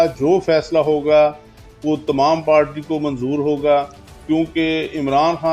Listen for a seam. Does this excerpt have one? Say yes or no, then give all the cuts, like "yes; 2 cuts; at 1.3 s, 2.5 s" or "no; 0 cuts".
no; 0 cuts